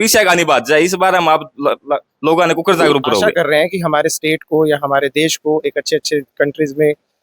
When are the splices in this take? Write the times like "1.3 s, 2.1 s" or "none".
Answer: 3.3 s